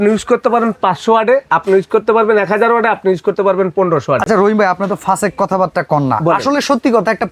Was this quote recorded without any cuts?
yes; 0 cuts

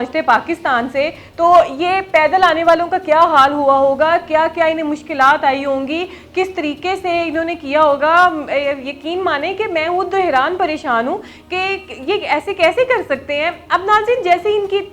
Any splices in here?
no; 0 cuts

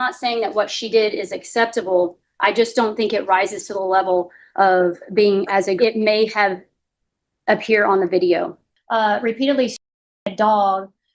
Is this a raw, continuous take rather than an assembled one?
no; 2 cuts; at 5.8 s, 8.7 s

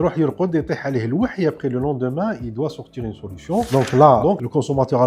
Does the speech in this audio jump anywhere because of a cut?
yes; 1 cut; at 3.7 s

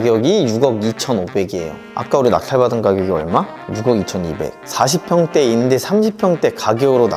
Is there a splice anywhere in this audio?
no; 0 cuts

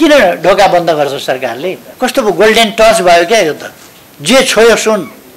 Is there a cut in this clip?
yes; 1 cut; at 1.9 s

